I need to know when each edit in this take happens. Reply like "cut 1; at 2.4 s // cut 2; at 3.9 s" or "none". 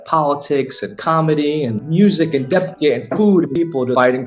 cut 1; at 1.8 s // cut 2; at 3.6 s

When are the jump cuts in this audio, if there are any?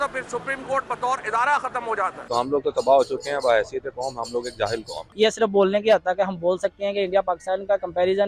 cut 1; at 2.2 s // cut 2; at 5.0 s

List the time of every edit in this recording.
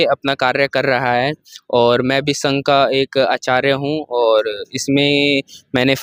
none

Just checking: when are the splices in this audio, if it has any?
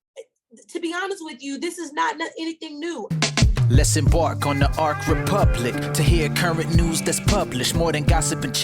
cut 1; at 3.1 s

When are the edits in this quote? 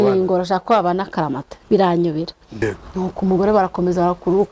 cut 1; at 2.6 s

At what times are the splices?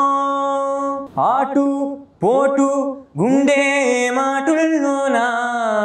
cut 1; at 1.0 s

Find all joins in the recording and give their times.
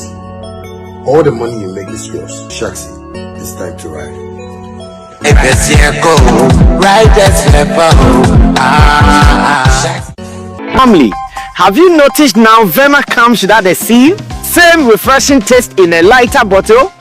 cut 1; at 2.5 s

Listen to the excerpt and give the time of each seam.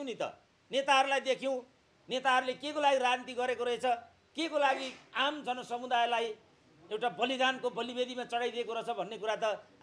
none

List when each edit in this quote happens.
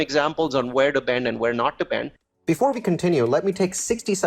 none

